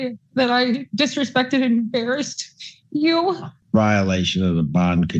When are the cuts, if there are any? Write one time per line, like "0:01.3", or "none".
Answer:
0:03.5